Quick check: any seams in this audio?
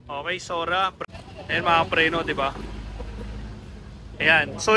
yes; 1 cut; at 1.0 s

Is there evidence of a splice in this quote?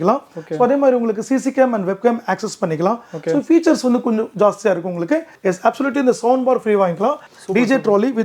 yes; 2 cuts; at 5.3 s, 7.3 s

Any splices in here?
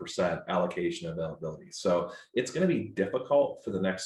no; 0 cuts

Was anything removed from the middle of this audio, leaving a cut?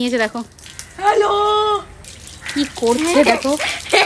no; 0 cuts

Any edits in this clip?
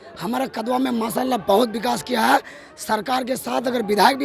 no; 0 cuts

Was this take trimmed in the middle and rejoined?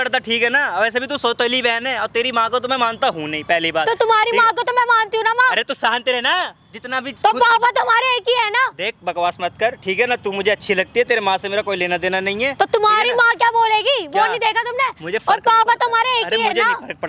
no; 0 cuts

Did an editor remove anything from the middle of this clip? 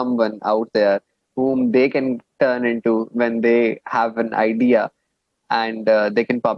no; 0 cuts

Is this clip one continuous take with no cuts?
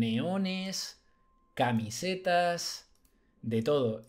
yes; 0 cuts

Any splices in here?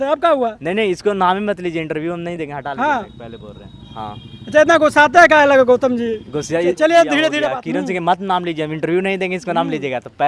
yes; 1 cut; at 7.4 s

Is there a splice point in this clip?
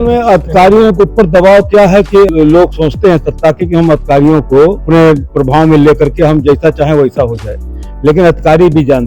yes; 2 cuts; at 2.3 s, 4.8 s

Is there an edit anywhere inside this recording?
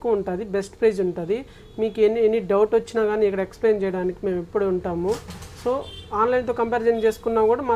no; 0 cuts

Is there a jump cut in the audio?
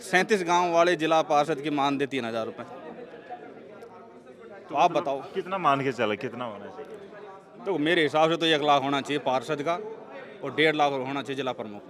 no; 0 cuts

